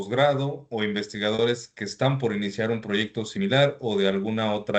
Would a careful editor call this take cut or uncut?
uncut